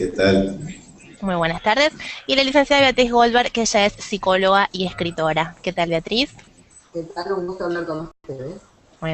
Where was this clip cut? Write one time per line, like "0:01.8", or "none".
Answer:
0:07.6